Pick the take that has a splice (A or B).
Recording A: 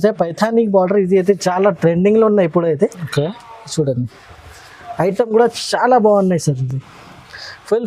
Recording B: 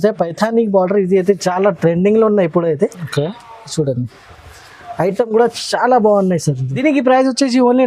B